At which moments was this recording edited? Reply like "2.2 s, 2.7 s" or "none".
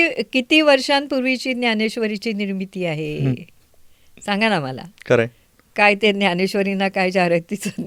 none